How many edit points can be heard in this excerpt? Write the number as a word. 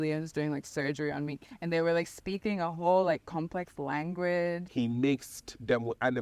one